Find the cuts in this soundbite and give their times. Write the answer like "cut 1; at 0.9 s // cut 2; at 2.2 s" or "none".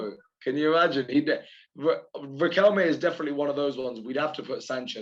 none